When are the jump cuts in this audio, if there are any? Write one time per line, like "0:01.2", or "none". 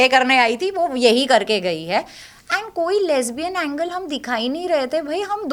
none